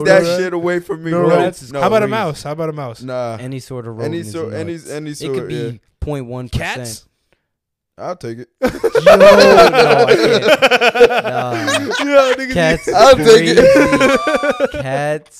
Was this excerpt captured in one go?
yes; 0 cuts

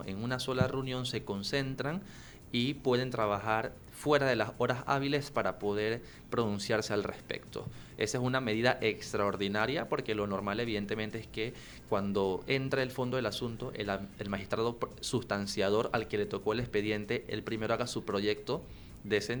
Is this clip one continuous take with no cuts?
yes; 0 cuts

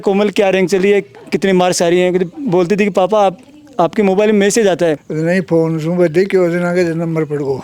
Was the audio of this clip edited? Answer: yes; 1 cut; at 5.1 s

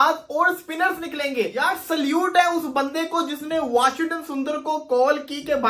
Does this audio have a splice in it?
yes; 1 cut; at 1.6 s

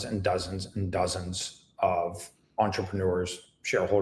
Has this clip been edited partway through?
no; 0 cuts

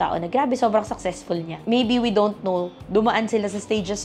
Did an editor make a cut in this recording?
yes; 1 cut; at 1.5 s

